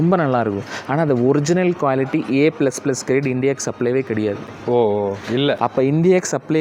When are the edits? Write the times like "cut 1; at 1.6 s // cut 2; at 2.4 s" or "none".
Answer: none

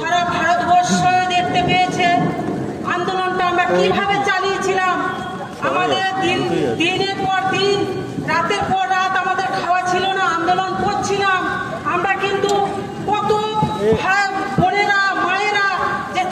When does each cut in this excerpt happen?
none

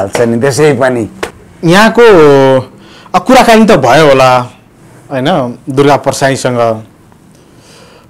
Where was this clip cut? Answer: cut 1; at 1.5 s

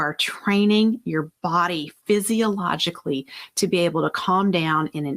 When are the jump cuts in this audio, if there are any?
none

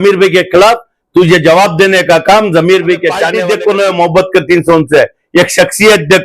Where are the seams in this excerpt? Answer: cut 1; at 3.3 s

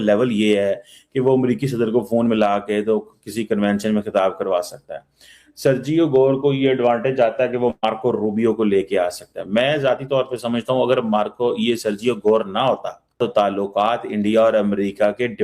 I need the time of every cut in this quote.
cut 1; at 13.2 s

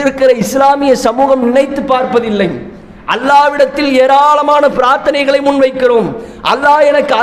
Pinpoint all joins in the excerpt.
none

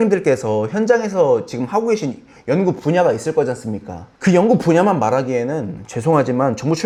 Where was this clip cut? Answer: none

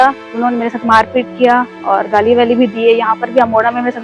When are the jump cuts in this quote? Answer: none

